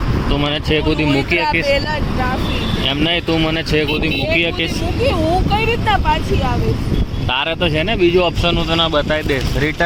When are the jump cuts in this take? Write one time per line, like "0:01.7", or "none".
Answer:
none